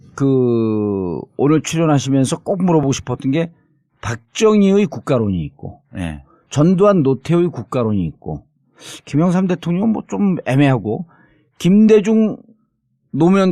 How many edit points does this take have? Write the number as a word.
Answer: one